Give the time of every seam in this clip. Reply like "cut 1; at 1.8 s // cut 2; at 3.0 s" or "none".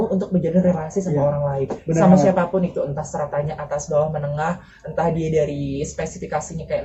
none